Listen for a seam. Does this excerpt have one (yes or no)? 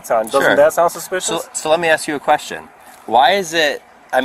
no